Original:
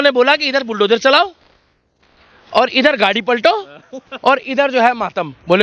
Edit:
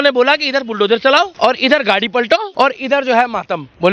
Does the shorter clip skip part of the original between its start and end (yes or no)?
yes